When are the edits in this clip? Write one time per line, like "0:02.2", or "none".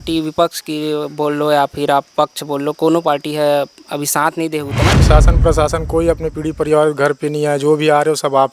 0:05.0